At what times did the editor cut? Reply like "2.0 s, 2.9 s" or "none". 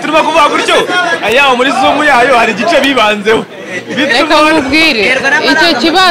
none